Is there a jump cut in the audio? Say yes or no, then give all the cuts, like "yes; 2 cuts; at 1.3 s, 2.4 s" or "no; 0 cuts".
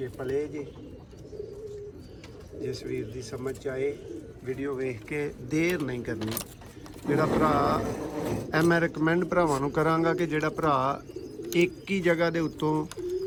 no; 0 cuts